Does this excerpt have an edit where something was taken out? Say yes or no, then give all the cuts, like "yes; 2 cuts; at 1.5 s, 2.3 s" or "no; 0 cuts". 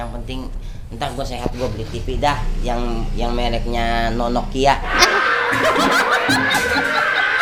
no; 0 cuts